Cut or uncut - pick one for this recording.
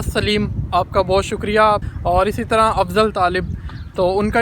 cut